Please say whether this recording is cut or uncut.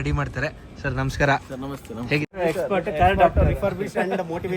cut